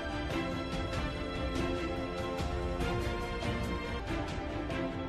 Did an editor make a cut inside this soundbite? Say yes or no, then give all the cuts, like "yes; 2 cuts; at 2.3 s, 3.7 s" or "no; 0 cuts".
no; 0 cuts